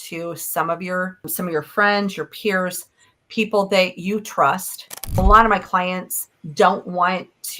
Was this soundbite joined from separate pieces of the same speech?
yes; 1 cut; at 5.2 s

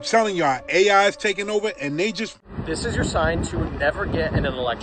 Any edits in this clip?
yes; 1 cut; at 2.3 s

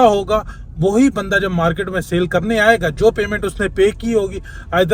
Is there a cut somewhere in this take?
no; 0 cuts

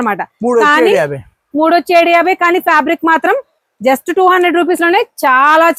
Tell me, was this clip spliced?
no; 0 cuts

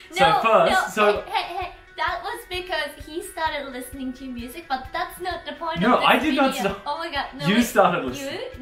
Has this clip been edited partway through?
no; 0 cuts

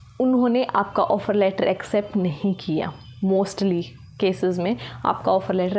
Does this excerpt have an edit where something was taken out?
no; 0 cuts

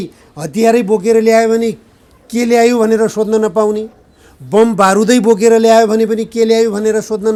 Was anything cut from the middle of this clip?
no; 0 cuts

